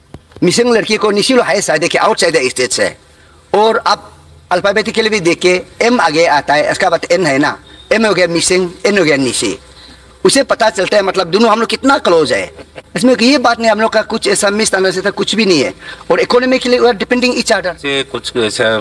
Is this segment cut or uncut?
cut